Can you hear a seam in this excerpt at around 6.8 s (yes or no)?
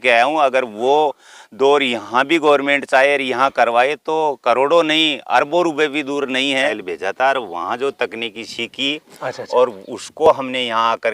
yes